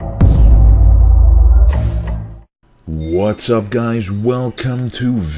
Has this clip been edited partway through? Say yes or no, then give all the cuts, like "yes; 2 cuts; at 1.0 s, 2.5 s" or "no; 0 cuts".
no; 0 cuts